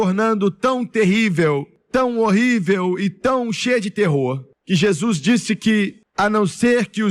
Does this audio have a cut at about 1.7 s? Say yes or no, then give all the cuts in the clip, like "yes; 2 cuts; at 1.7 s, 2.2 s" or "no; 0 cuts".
yes; 3 cuts; at 1.7 s, 4.5 s, 6.0 s